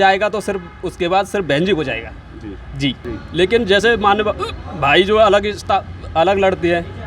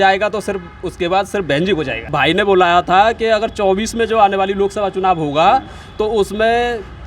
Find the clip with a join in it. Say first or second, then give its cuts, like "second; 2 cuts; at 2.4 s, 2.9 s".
second; 1 cut; at 2.0 s